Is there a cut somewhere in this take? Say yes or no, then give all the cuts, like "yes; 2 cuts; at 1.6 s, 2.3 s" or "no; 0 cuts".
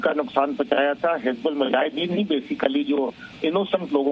yes; 1 cut; at 1.2 s